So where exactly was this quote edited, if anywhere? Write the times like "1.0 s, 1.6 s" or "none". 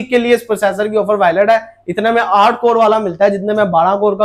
none